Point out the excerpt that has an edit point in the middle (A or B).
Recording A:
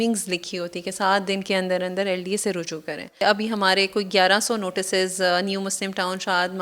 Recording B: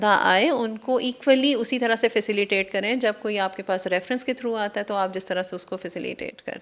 A